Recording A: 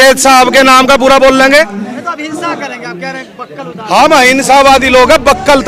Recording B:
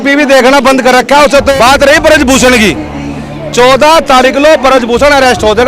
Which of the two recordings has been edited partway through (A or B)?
B